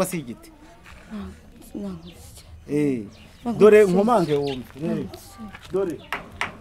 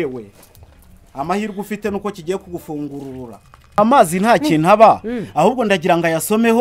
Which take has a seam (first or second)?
second